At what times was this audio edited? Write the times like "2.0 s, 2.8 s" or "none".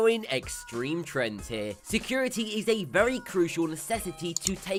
none